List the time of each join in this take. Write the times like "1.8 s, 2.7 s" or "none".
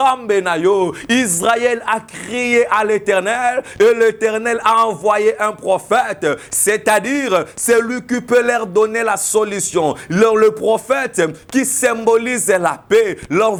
none